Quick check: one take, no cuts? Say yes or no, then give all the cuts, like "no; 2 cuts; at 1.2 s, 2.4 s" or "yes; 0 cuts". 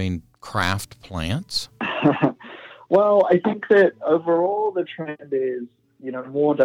no; 1 cut; at 1.6 s